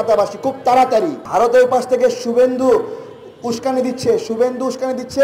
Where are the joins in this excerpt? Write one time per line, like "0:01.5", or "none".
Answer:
0:01.2